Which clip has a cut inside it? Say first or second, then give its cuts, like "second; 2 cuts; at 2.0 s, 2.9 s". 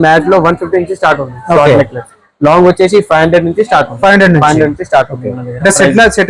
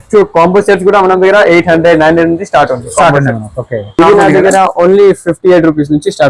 second; 1 cut; at 4.0 s